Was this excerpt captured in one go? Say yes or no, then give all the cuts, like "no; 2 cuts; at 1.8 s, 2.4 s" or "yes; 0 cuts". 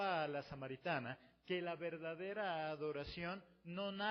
yes; 0 cuts